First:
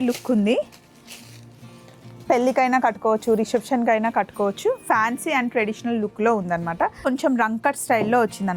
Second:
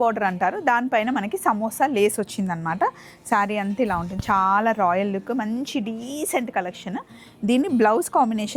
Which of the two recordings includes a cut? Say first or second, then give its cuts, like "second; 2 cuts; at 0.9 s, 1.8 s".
first; 1 cut; at 7.0 s